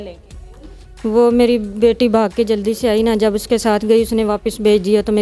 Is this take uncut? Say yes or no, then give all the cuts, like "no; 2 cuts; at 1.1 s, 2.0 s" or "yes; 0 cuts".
yes; 0 cuts